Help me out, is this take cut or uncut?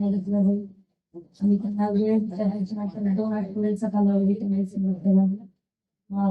uncut